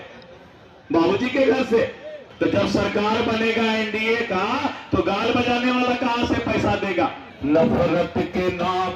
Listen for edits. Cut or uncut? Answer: cut